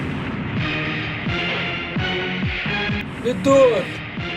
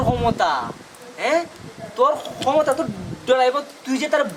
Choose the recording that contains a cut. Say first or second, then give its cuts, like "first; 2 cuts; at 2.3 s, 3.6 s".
first; 1 cut; at 3.0 s